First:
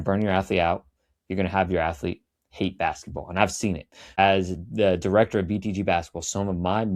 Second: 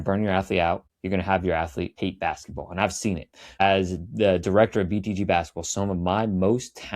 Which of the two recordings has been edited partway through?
second; 2 cuts; at 0.9 s, 1.9 s

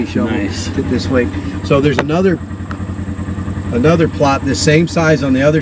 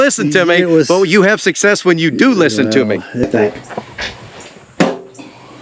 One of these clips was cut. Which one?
second; 1 cut; at 3.1 s

